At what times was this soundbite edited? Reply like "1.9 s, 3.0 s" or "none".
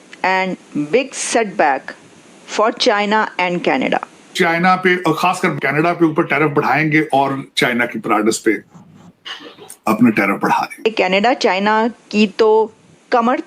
4.3 s, 5.6 s, 10.8 s